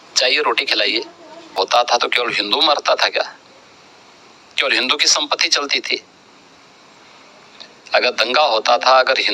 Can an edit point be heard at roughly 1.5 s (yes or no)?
yes